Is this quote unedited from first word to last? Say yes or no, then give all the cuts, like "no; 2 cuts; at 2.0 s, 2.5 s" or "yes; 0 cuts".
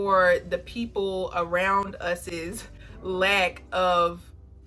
yes; 0 cuts